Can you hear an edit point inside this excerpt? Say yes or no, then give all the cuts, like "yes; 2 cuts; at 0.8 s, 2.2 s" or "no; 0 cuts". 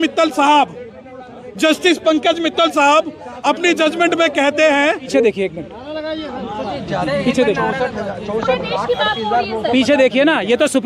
yes; 1 cut; at 5.1 s